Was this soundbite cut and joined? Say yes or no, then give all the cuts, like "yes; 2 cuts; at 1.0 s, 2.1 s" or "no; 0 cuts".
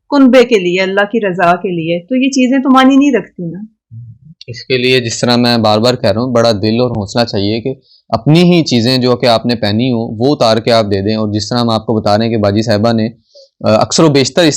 no; 0 cuts